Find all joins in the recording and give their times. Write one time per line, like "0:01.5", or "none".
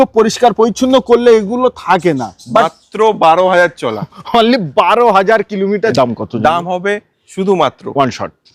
0:05.9